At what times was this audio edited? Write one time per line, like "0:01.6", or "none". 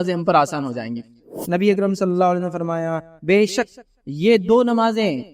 0:01.3